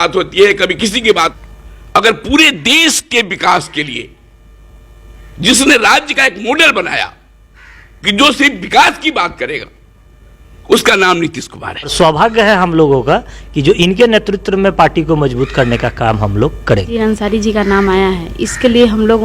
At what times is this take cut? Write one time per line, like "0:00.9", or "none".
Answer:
0:01.3
0:11.9
0:17.0